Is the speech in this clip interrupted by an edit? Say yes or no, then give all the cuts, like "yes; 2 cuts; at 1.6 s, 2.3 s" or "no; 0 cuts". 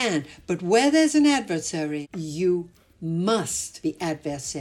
yes; 2 cuts; at 2.1 s, 3.6 s